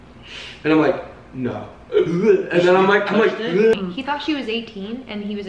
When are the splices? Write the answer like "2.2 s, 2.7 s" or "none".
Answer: 3.7 s